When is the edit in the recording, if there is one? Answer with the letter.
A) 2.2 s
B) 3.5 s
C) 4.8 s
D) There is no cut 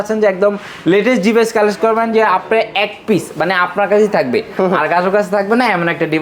D